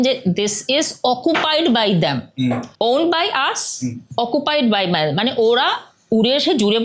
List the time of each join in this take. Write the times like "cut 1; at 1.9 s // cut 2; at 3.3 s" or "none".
none